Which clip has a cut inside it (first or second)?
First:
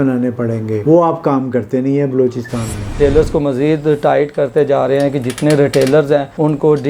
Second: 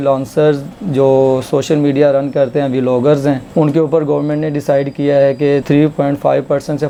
first